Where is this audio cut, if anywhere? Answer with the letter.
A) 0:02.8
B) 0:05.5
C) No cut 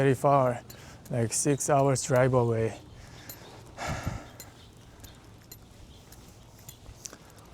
C